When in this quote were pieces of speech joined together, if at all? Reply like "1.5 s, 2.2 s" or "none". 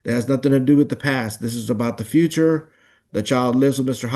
none